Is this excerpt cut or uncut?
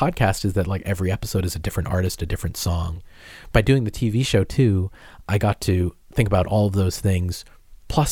cut